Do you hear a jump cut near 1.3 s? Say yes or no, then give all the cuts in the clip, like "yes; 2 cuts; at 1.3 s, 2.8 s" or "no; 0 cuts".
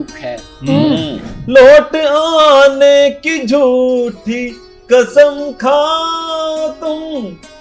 yes; 1 cut; at 1.3 s